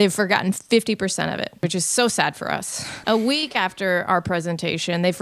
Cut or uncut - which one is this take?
cut